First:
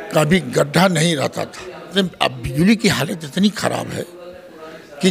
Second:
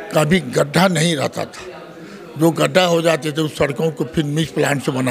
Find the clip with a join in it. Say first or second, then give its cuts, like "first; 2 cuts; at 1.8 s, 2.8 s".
first; 1 cut; at 1.9 s